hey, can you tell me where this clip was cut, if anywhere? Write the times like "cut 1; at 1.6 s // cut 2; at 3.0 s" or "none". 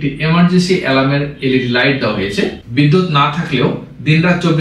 cut 1; at 2.6 s